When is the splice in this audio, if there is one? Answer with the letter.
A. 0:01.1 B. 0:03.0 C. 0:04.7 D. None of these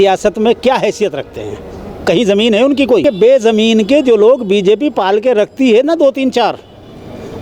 B